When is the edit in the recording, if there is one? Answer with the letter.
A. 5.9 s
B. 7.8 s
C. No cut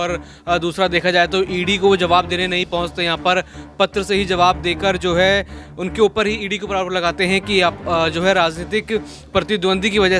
B